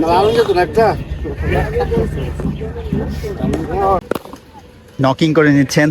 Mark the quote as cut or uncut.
cut